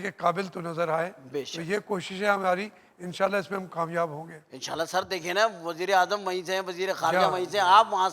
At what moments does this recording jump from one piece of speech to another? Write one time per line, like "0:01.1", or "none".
none